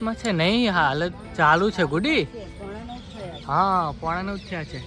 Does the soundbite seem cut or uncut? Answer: uncut